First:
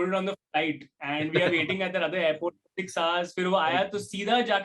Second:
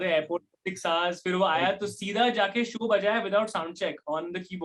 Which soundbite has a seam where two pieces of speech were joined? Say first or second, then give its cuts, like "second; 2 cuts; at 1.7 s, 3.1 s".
first; 1 cut; at 1.0 s